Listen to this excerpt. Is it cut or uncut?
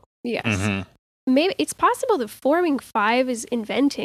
cut